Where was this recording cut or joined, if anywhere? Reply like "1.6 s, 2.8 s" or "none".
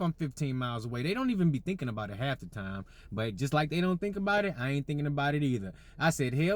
none